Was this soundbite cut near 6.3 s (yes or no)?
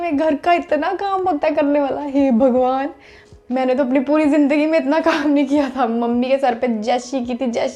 no